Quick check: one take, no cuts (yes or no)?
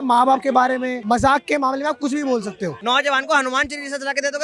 no